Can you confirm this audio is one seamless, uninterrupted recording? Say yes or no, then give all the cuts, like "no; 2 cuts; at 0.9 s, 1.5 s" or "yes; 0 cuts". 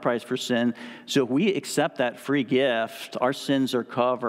yes; 0 cuts